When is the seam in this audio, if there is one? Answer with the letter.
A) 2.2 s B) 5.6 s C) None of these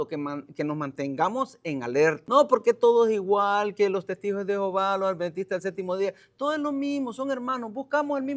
A